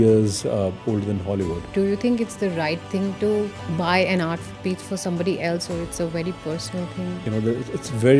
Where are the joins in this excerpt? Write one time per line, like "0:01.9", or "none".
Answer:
0:01.6
0:07.2